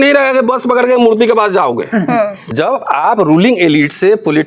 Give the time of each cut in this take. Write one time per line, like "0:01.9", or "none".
0:02.4